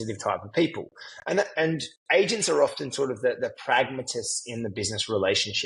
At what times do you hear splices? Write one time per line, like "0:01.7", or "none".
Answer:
none